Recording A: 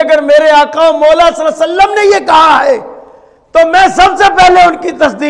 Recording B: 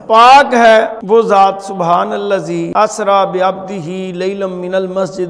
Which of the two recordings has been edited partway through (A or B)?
B